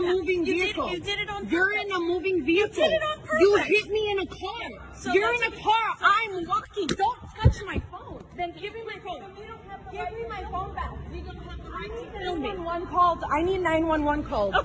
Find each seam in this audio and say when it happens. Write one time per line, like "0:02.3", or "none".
none